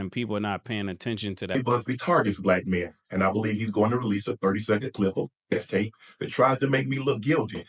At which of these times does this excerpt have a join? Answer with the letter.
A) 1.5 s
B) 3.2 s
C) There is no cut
A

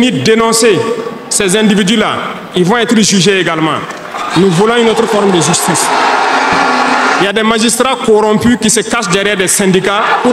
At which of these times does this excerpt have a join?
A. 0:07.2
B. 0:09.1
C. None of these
A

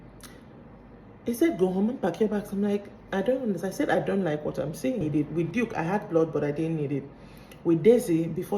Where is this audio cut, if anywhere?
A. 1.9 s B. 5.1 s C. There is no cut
B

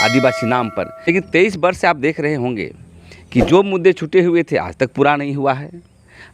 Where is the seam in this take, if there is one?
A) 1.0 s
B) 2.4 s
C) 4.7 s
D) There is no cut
A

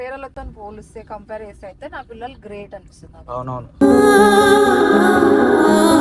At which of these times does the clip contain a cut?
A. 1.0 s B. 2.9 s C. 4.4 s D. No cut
D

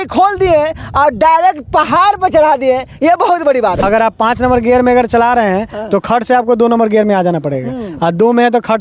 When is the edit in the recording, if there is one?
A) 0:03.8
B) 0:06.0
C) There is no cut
A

